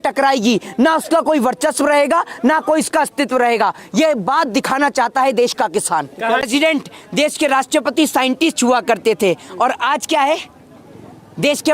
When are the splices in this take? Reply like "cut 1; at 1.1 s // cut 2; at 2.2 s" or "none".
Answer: cut 1; at 6.5 s